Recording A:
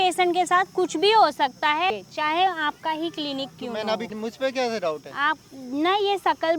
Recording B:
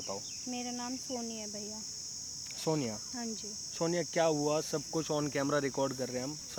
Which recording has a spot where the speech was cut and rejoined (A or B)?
A